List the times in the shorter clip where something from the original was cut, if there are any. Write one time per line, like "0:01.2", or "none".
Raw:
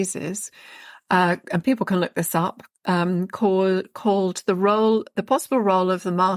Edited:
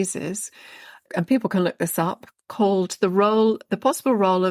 0:01.0
0:02.4